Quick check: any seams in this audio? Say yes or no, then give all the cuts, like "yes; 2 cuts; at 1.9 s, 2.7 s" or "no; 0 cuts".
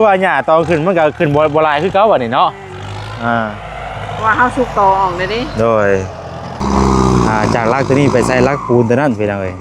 yes; 1 cut; at 6.6 s